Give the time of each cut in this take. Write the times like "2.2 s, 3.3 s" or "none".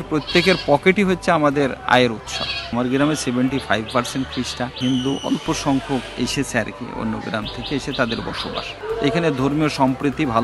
2.7 s, 4.8 s, 8.7 s